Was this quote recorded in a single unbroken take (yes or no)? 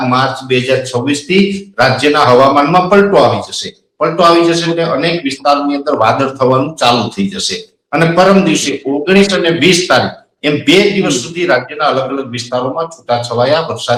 yes